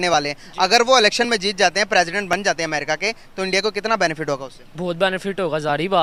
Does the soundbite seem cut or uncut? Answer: uncut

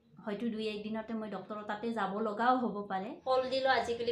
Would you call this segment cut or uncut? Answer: cut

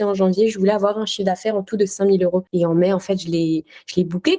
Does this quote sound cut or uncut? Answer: uncut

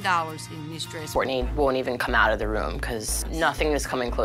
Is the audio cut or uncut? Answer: cut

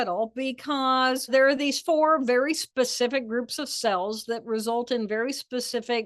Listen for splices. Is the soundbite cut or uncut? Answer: cut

